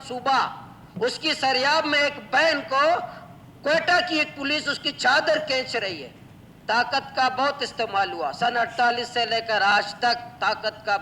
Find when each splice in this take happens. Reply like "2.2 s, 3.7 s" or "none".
6.4 s